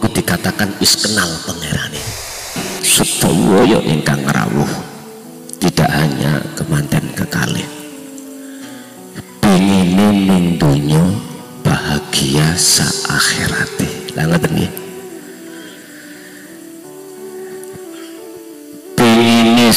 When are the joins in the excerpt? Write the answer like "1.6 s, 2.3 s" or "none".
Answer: 2.4 s